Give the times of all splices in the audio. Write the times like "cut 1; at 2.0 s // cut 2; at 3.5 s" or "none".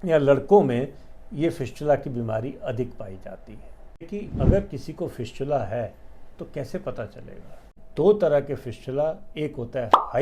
cut 1; at 4.1 s // cut 2; at 7.8 s